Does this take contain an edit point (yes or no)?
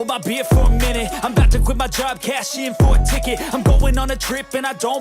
yes